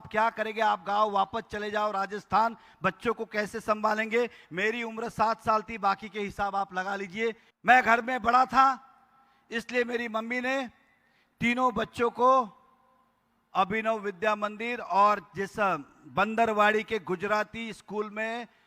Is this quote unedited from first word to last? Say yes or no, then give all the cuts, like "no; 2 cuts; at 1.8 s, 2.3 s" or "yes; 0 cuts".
no; 1 cut; at 7.5 s